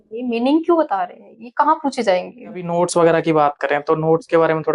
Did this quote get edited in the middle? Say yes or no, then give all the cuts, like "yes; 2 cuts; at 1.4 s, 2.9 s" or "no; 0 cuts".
yes; 1 cut; at 2.7 s